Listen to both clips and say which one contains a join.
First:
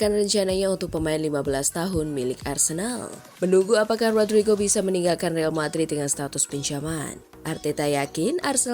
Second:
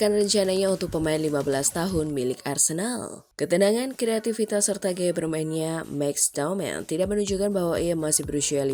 first; 2 cuts; at 3.2 s, 7.3 s

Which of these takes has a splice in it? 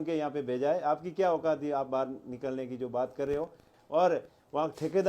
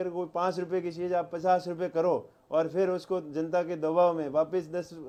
first; 1 cut; at 3.7 s

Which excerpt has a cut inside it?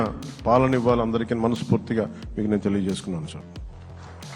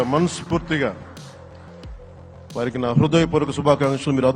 second; 2 cuts; at 1.1 s, 2.5 s

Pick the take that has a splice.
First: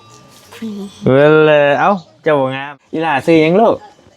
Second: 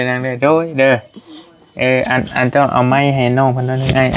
first; 1 cut; at 3.2 s

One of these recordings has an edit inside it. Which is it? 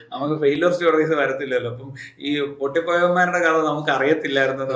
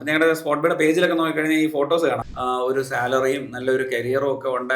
second; 1 cut; at 2.2 s

